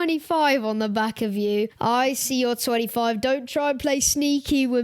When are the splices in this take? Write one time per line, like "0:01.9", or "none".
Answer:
0:01.7